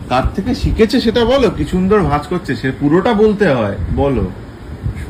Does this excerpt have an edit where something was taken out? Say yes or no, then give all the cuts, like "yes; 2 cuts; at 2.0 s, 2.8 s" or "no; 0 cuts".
no; 0 cuts